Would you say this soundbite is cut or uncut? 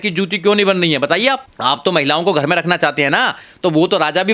cut